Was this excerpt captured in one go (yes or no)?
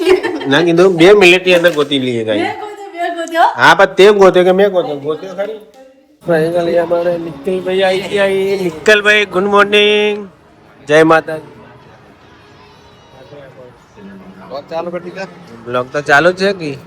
no